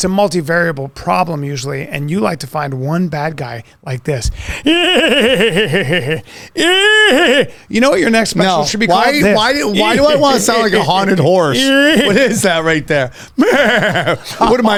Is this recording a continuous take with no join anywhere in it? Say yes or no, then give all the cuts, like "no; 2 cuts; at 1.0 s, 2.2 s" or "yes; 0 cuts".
yes; 0 cuts